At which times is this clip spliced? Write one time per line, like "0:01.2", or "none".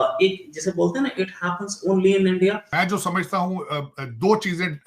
0:02.7